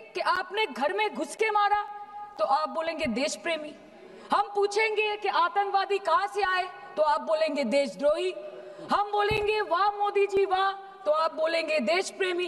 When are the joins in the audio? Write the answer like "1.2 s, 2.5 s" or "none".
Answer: none